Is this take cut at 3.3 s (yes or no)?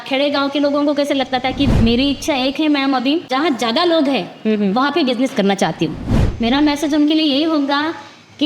yes